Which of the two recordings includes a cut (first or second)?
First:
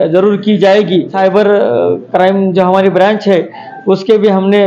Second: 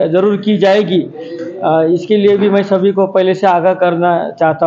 first